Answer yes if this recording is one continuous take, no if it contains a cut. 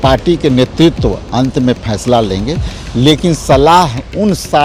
yes